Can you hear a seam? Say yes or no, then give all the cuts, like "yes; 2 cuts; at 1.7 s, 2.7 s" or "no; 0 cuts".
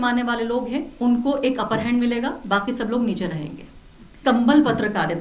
yes; 1 cut; at 4.2 s